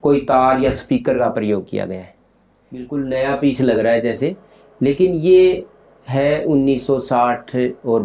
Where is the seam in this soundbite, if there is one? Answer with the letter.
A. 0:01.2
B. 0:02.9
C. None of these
B